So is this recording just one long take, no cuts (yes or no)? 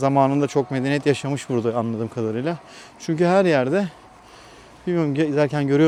yes